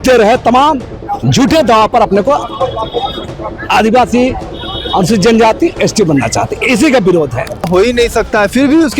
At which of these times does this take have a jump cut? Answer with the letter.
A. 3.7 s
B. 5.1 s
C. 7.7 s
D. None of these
C